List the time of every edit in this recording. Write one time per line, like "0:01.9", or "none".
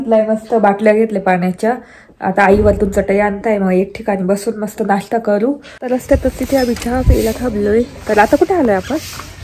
0:05.7